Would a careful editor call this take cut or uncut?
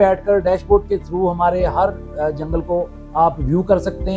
uncut